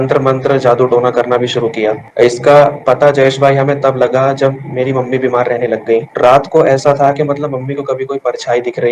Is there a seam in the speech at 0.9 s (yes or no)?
no